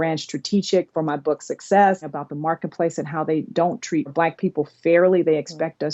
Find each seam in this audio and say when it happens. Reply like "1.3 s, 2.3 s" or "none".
2.1 s, 4.1 s